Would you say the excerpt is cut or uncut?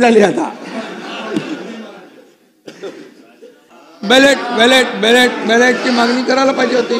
cut